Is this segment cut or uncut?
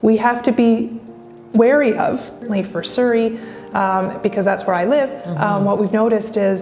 cut